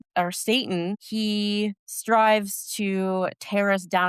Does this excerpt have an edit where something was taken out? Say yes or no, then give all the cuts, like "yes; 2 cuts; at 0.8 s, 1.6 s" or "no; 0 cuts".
yes; 2 cuts; at 1.0 s, 1.9 s